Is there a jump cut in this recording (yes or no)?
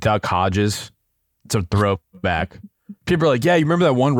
no